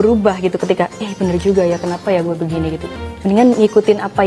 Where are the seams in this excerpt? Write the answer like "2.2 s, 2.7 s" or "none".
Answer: 2.9 s